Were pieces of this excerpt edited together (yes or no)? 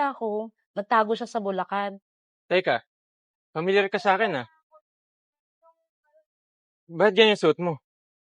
yes